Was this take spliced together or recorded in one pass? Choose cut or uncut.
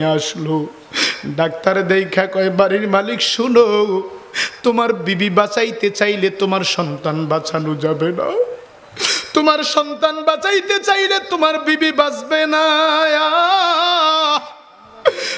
uncut